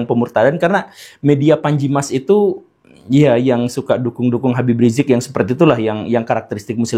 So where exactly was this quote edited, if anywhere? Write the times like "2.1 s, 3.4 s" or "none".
none